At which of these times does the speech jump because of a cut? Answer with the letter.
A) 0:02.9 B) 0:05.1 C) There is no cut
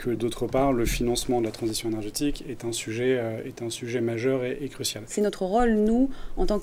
B